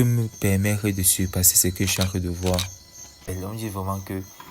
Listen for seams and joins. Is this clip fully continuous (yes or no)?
no